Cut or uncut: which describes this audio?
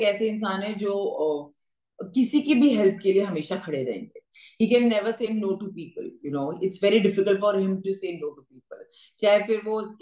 uncut